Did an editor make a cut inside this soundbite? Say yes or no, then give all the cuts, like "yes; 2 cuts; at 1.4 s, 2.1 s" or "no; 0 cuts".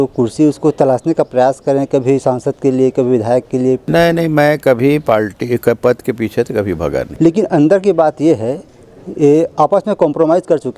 yes; 2 cuts; at 3.8 s, 7.1 s